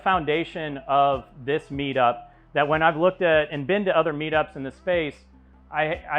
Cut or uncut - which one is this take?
uncut